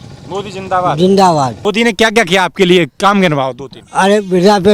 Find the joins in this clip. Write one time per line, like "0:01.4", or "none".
0:01.6